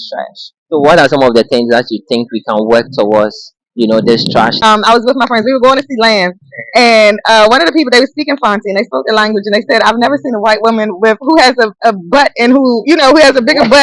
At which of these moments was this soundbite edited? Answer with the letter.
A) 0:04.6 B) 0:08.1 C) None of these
A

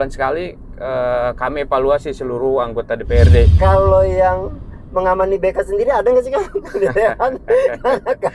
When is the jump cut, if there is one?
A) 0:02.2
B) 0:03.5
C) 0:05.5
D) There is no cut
B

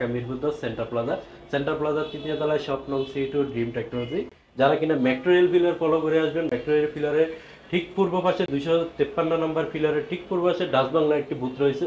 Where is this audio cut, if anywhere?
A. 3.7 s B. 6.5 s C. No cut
C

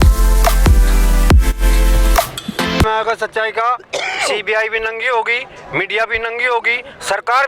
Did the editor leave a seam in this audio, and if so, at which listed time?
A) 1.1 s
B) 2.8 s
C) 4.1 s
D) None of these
B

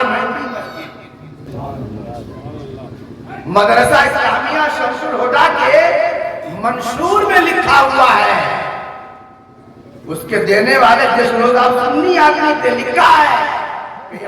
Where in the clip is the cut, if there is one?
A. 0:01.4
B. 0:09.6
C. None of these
A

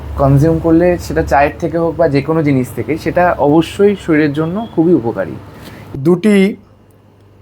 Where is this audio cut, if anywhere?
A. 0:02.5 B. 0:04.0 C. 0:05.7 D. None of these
C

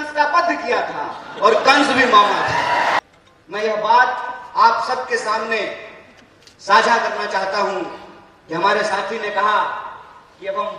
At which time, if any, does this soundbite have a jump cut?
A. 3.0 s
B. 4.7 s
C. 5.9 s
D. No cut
A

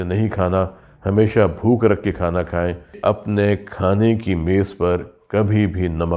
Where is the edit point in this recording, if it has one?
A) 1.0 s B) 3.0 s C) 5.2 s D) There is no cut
B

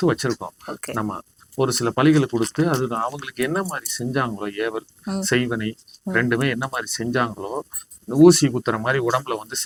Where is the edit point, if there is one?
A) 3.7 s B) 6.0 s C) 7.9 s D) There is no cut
D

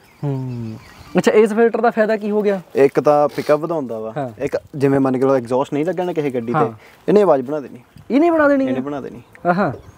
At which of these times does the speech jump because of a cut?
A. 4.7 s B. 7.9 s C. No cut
C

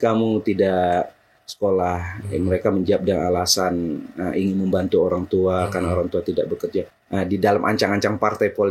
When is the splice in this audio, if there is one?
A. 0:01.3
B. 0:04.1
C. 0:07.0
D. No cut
C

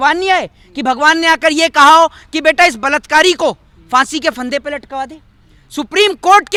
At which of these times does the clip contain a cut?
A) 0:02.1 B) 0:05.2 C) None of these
C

